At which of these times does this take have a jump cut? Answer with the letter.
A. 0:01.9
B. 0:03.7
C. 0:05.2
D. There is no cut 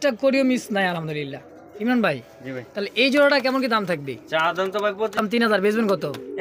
C